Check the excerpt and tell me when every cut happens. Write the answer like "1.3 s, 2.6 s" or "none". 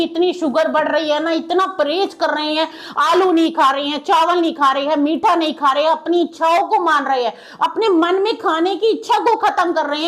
none